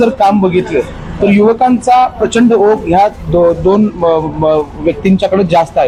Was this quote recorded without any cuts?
yes; 0 cuts

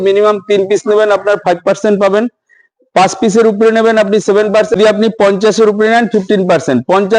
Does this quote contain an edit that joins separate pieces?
yes; 1 cut; at 4.8 s

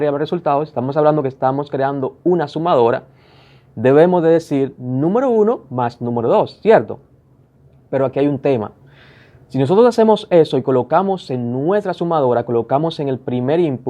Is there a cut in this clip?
no; 0 cuts

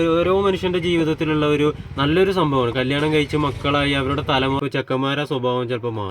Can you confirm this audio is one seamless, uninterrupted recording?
no; 1 cut; at 4.6 s

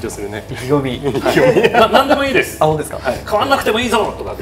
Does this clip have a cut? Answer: no; 0 cuts

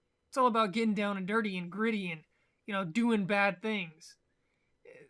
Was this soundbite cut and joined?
no; 0 cuts

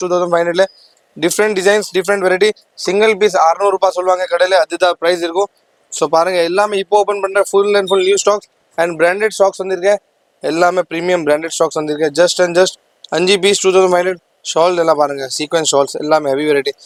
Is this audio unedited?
yes; 0 cuts

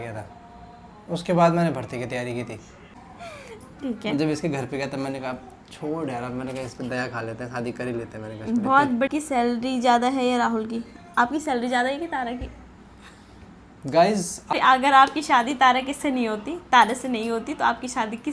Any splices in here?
yes; 3 cuts; at 3.0 s, 9.1 s, 14.5 s

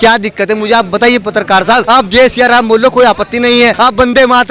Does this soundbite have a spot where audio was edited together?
yes; 2 cuts; at 1.8 s, 3.7 s

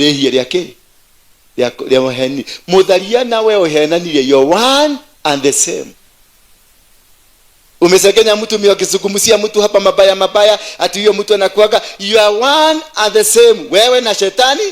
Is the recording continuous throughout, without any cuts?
yes; 0 cuts

